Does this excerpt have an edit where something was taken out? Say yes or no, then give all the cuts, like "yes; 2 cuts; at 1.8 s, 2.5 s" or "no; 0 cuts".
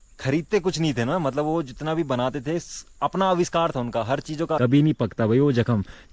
yes; 1 cut; at 4.4 s